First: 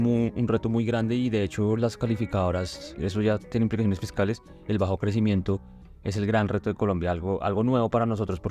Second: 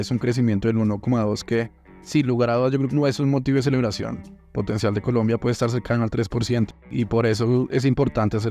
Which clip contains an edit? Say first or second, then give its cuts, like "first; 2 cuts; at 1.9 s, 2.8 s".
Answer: second; 2 cuts; at 2.9 s, 6.9 s